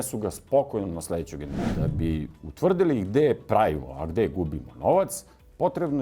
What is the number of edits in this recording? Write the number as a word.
one